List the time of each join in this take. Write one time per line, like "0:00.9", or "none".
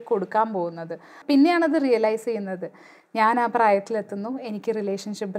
0:01.1

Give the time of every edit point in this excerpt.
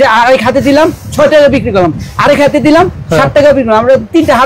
none

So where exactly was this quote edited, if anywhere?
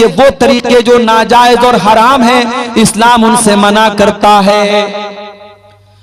none

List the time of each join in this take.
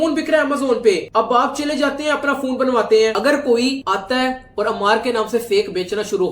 0:03.2

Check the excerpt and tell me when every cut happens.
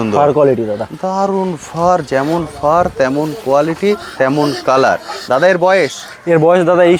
none

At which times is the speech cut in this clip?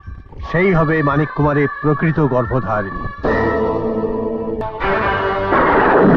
0:04.6

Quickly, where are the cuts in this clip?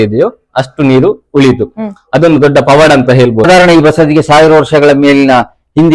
0:03.5

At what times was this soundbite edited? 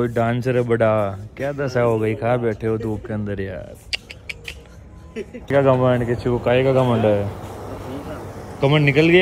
none

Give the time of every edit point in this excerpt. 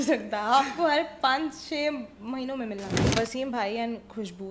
0:03.1

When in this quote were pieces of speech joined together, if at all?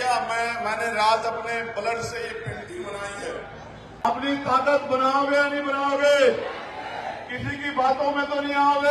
0:03.9

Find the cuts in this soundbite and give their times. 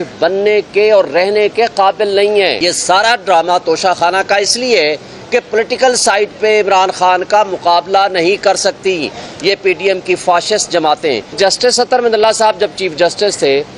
0:02.6
0:11.3

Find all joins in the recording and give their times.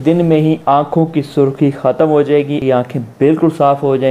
0:02.6

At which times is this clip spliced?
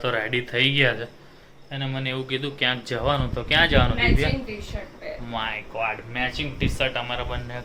none

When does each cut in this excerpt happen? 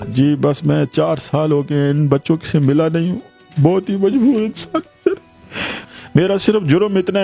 0:05.7

